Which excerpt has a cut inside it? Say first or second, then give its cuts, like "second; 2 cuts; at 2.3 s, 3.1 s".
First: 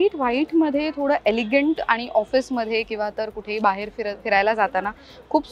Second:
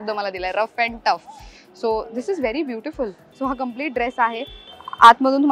second; 2 cuts; at 3.2 s, 4.6 s